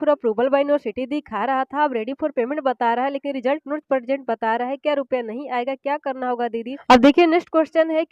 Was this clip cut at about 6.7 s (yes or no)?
yes